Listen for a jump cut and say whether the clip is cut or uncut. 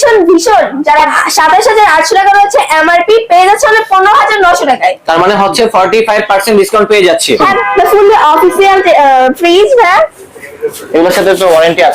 cut